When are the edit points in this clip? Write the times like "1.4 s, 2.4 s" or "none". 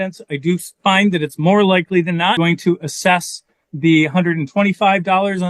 2.4 s